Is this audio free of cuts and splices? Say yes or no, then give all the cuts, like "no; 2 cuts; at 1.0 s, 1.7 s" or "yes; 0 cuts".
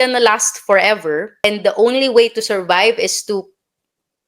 no; 1 cut; at 1.4 s